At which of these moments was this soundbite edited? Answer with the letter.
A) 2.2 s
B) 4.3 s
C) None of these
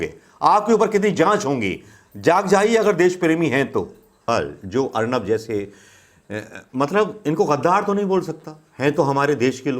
B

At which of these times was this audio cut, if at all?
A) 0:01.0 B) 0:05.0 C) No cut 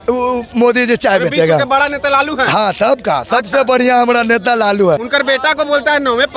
B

